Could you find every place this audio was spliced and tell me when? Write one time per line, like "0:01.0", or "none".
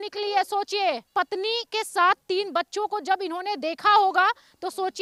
none